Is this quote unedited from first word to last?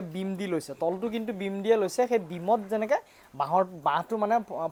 yes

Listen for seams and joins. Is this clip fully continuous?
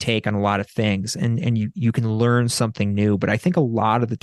yes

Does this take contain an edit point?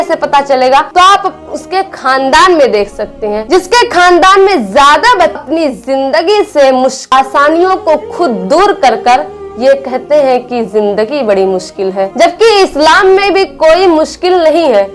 yes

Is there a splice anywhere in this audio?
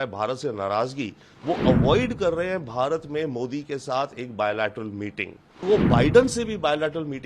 yes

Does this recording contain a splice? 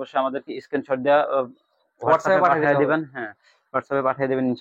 no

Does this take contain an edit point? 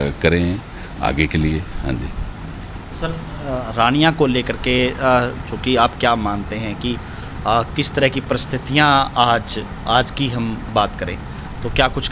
no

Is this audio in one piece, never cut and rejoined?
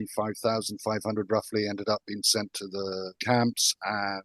no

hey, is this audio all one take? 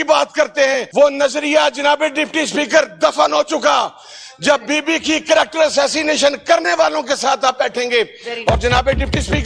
yes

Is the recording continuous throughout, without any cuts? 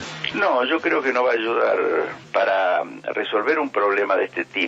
yes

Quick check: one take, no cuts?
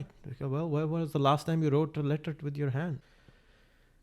no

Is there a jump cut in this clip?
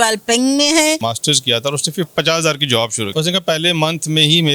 yes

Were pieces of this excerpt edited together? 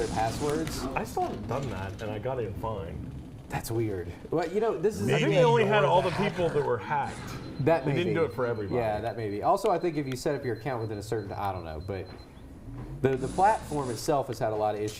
no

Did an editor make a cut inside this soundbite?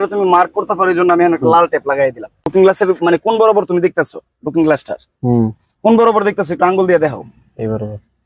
yes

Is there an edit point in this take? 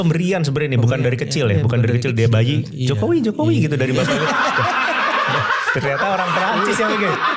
no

